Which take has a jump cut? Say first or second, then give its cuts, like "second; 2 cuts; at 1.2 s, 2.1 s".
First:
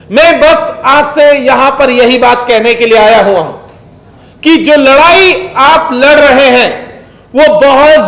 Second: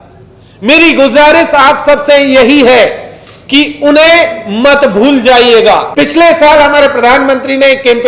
second; 1 cut; at 5.9 s